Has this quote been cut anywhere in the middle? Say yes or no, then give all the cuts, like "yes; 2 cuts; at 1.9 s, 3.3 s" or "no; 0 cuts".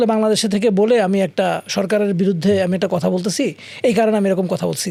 no; 0 cuts